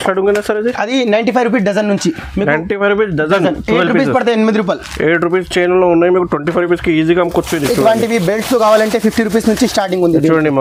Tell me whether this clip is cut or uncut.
uncut